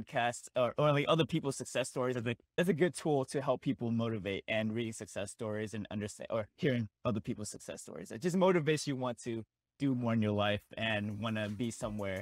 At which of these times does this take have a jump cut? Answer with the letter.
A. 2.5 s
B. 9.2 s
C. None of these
A